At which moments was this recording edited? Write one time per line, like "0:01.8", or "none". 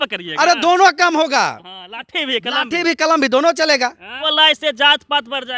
0:04.1